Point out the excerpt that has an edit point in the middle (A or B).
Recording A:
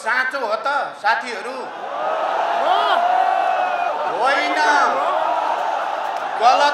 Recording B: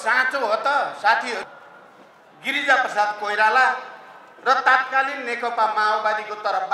B